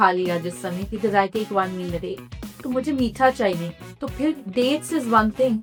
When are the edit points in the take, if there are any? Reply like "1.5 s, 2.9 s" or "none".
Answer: none

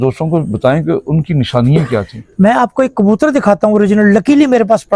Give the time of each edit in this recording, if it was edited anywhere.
none

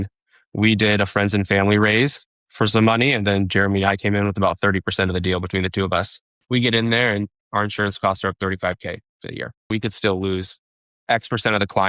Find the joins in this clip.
2.4 s, 6.3 s, 9.6 s

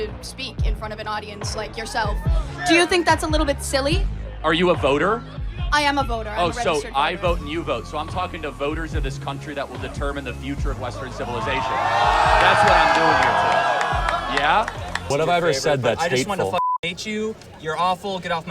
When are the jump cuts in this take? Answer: 15.0 s

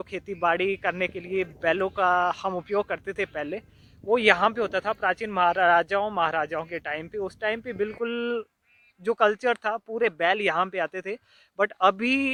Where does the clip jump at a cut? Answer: none

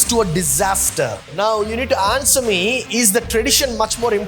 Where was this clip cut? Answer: 1.2 s

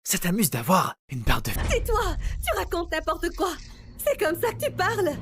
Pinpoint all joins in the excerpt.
1.6 s

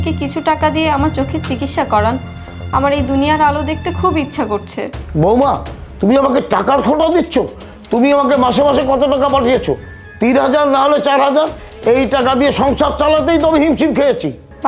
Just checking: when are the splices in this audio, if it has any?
none

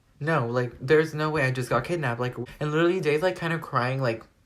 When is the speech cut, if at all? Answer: 2.4 s

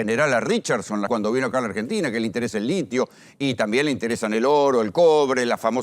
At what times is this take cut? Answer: 1.1 s

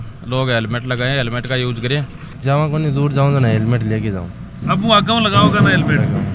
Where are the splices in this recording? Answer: 2.3 s

